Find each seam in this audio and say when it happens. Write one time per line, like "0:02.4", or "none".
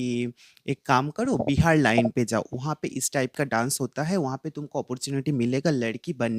none